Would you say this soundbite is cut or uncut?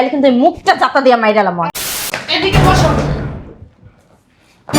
cut